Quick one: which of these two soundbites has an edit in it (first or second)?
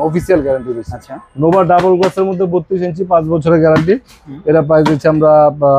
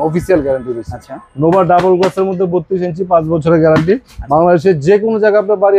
second